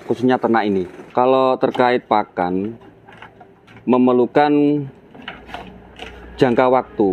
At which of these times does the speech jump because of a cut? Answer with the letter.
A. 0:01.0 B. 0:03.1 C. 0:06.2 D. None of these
A